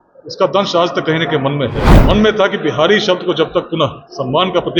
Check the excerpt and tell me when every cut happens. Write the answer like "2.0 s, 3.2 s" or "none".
1.9 s